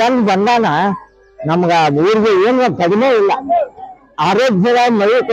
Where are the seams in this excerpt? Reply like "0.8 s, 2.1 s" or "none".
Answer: none